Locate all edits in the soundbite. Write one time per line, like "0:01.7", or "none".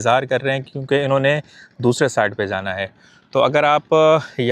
none